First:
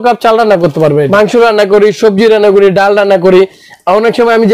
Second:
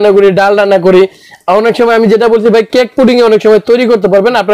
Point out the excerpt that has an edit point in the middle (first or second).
first